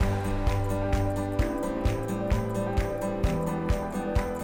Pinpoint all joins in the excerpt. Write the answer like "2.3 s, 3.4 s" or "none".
none

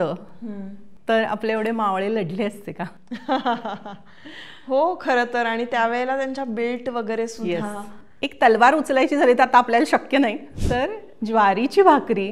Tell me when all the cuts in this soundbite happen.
10.5 s

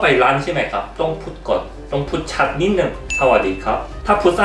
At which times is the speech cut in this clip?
none

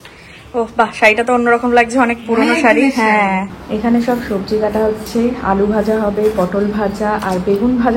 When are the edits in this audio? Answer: 3.6 s

